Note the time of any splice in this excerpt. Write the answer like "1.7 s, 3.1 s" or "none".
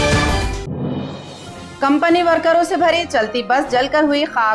none